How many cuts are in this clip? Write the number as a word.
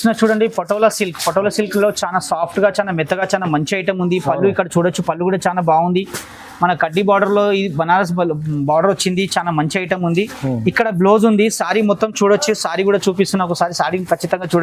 zero